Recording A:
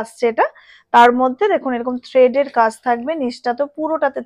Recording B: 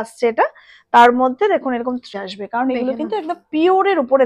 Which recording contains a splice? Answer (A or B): B